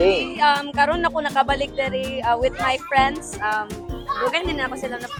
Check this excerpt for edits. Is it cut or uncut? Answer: uncut